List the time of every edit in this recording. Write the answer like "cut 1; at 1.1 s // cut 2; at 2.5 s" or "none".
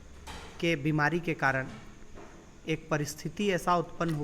none